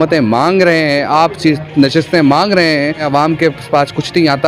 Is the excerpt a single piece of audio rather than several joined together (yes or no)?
no